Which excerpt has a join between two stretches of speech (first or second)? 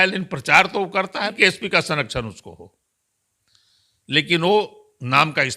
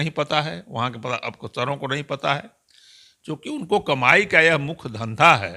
first